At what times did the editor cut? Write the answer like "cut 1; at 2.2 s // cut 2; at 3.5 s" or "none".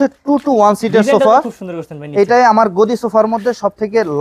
none